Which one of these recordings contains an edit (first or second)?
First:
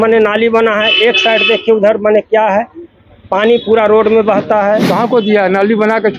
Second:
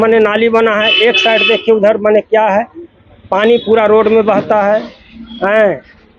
first